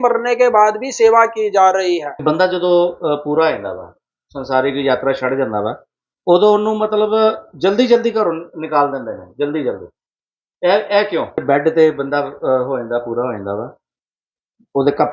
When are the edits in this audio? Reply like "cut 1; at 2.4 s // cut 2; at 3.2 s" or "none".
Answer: cut 1; at 2.1 s // cut 2; at 11.4 s